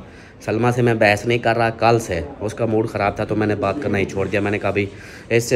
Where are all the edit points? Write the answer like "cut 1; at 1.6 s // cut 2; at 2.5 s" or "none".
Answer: none